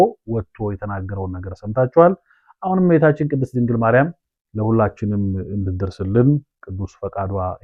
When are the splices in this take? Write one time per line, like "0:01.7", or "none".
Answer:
none